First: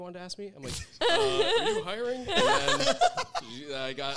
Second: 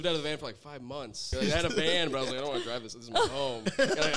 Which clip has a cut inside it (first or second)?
second